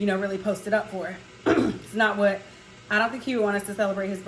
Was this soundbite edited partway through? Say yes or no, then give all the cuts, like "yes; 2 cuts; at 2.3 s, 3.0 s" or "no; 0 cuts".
no; 0 cuts